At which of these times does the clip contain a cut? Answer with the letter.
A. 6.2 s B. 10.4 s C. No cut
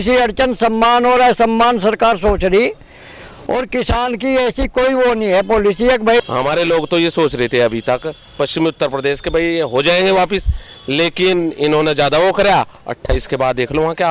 A